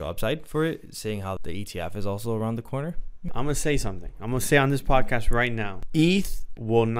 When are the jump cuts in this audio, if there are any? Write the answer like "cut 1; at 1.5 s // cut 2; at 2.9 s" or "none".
cut 1; at 1.4 s // cut 2; at 3.3 s // cut 3; at 5.7 s